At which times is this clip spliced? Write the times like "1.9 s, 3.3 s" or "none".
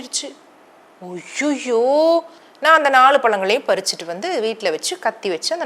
2.3 s